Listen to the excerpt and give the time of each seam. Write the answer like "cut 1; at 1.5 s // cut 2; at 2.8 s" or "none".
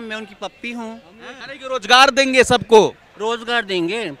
cut 1; at 1.3 s

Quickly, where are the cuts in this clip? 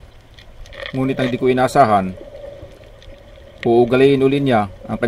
cut 1; at 0.9 s

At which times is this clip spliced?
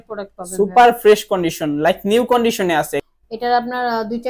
cut 1; at 3.0 s

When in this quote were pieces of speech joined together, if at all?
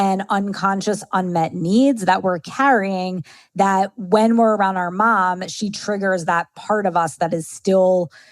none

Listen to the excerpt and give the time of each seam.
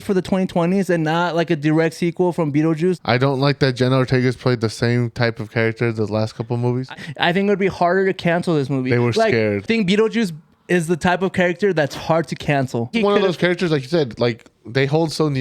cut 1; at 3.0 s // cut 2; at 6.9 s // cut 3; at 9.7 s // cut 4; at 12.9 s

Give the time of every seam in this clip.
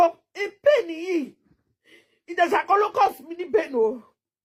none

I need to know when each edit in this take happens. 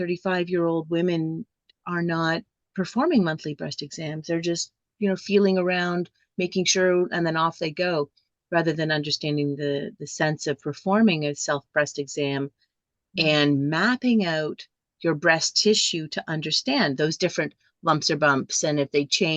cut 1; at 2.6 s

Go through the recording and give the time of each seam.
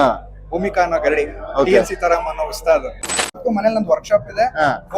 cut 1; at 3.1 s

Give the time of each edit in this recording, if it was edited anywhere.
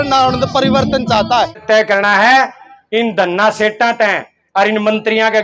cut 1; at 1.6 s

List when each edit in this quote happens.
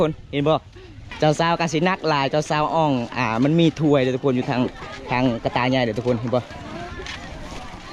cut 1; at 1.1 s // cut 2; at 6.6 s

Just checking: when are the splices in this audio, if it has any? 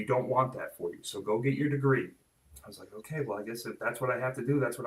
cut 1; at 2.2 s

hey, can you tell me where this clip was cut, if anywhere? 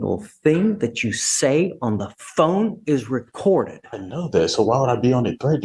none

